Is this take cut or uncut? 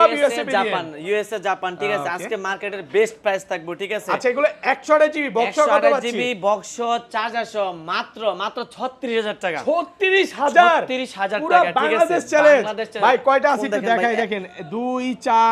uncut